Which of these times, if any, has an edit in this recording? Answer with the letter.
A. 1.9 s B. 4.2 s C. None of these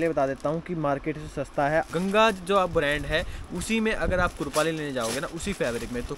A